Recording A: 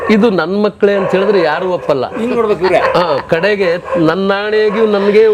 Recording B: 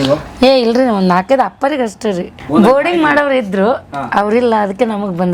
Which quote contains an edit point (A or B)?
B